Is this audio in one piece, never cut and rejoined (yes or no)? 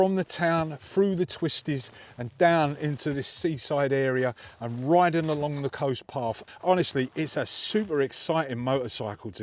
no